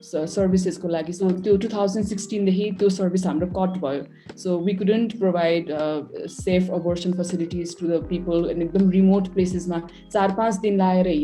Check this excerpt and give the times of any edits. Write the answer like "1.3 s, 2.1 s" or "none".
1.1 s